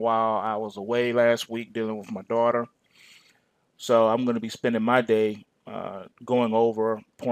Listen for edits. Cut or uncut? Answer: uncut